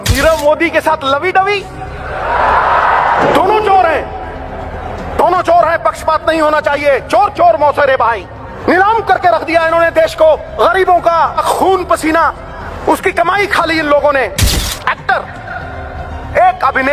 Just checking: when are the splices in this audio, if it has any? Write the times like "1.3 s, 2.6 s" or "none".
8.5 s, 10.5 s, 11.4 s, 12.6 s, 14.5 s